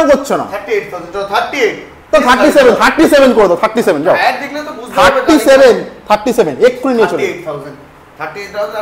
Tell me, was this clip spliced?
no; 0 cuts

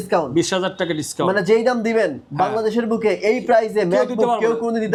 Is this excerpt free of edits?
yes; 0 cuts

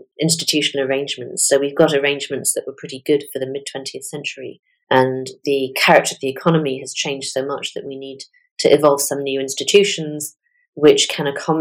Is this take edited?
no; 0 cuts

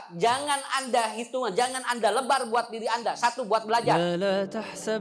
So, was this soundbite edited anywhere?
yes; 1 cut; at 4.0 s

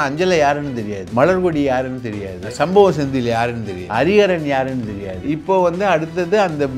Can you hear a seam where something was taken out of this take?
yes; 4 cuts; at 1.0 s, 2.4 s, 3.7 s, 5.2 s

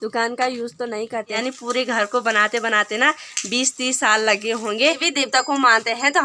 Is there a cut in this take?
yes; 2 cuts; at 1.4 s, 5.0 s

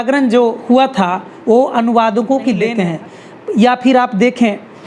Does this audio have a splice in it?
yes; 1 cut; at 2.7 s

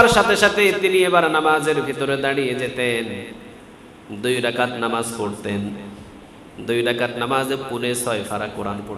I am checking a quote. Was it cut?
no; 0 cuts

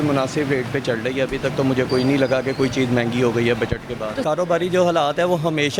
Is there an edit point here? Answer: no; 0 cuts

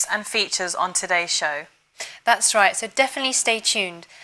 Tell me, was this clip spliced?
no; 0 cuts

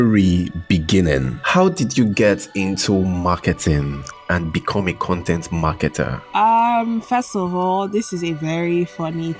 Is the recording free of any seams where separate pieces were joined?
no; 2 cuts; at 1.4 s, 6.2 s

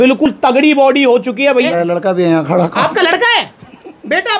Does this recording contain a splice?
yes; 1 cut; at 1.7 s

